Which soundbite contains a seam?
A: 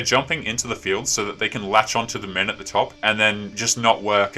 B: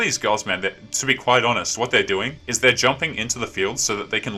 A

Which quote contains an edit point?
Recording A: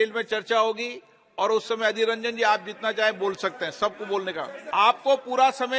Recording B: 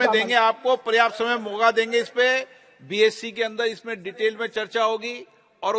A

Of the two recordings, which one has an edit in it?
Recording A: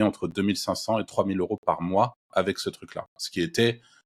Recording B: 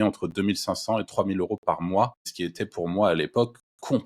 B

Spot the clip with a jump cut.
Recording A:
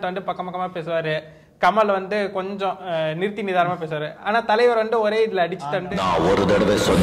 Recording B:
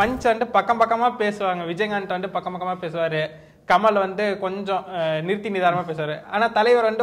A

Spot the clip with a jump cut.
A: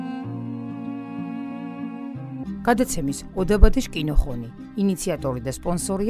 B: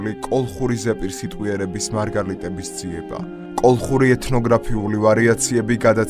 A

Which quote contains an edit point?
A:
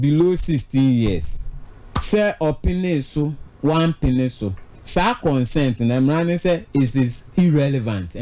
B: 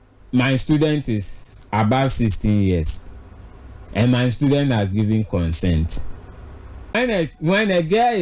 B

